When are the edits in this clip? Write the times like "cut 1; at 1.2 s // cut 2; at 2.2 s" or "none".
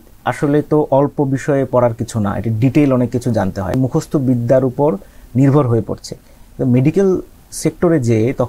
cut 1; at 3.7 s